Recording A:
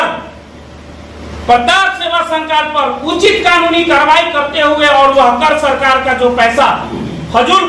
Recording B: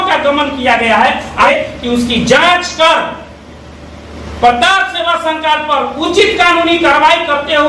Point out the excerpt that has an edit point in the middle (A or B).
B